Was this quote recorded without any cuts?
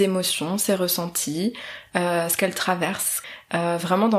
no; 1 cut; at 3.1 s

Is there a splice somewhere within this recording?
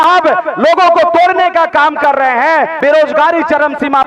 yes; 1 cut; at 2.8 s

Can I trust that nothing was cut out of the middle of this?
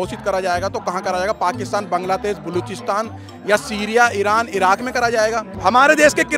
yes; 0 cuts

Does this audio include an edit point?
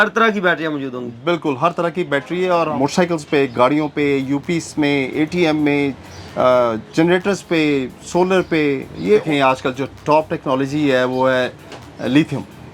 yes; 2 cuts; at 2.7 s, 9.2 s

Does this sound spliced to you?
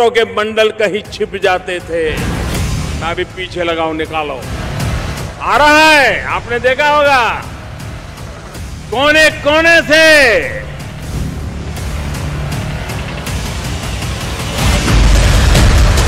yes; 1 cut; at 15.1 s

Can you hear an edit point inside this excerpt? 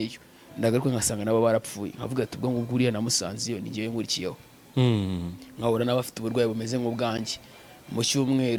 no; 0 cuts

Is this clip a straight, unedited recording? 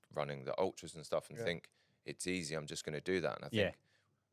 yes; 0 cuts

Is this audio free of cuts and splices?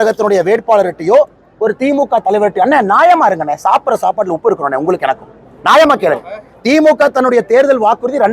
yes; 0 cuts

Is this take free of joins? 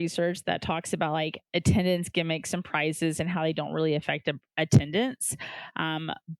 no; 1 cut; at 1.4 s

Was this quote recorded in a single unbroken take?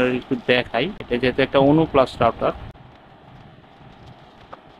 yes; 0 cuts

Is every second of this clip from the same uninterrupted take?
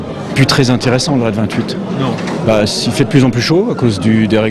yes; 0 cuts

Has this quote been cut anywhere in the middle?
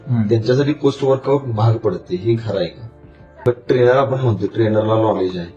yes; 1 cut; at 3.2 s

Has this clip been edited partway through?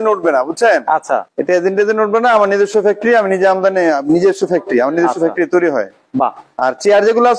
yes; 1 cut; at 1.3 s

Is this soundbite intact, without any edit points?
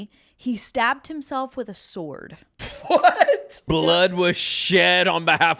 no; 2 cuts; at 2.9 s, 3.6 s

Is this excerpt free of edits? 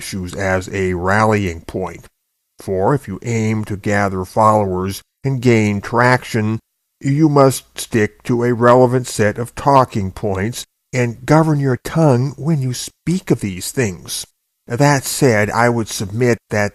yes; 0 cuts

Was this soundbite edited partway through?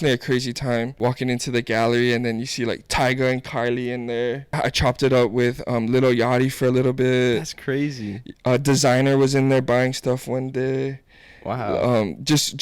yes; 2 cuts; at 0.9 s, 4.5 s

